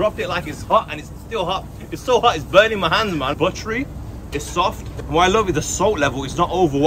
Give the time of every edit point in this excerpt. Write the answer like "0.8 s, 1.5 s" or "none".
3.4 s, 4.9 s